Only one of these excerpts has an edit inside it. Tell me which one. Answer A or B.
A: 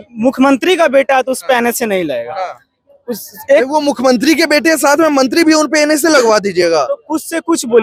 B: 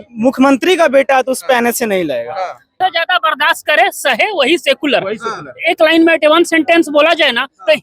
B